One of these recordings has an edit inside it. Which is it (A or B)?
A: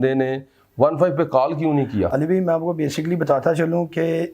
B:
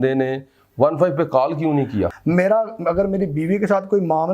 B